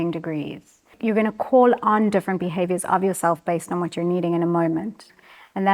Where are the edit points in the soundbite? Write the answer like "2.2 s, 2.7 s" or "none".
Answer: 0.9 s

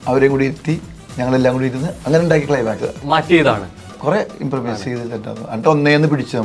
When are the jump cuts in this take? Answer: 3.0 s

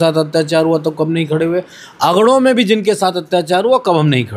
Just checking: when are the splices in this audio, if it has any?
none

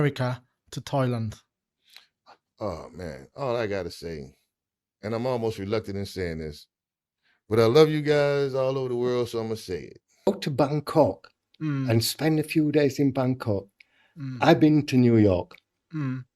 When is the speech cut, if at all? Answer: 10.3 s

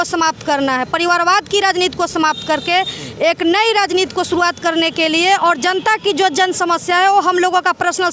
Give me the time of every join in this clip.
none

